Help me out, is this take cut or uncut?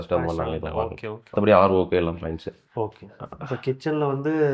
uncut